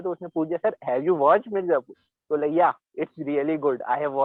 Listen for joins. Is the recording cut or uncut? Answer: uncut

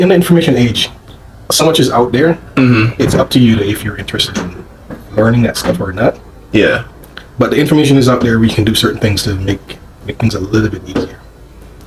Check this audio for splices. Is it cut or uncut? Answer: uncut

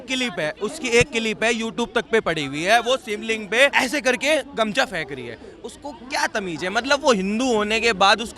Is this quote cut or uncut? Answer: cut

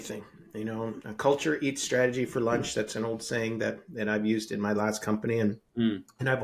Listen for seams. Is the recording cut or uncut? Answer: uncut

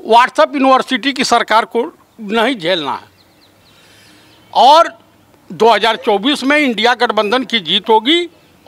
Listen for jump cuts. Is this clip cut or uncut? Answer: uncut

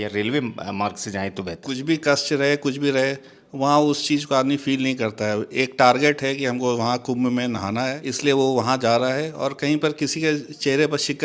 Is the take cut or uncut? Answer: cut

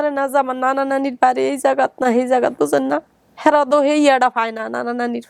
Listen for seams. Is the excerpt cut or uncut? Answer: uncut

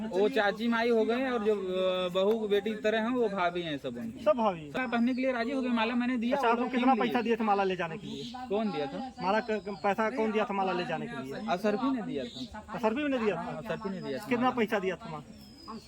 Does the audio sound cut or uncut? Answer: cut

